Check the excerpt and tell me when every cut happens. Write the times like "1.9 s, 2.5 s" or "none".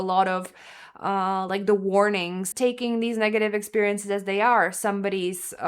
2.4 s